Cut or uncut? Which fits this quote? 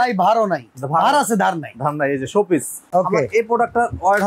cut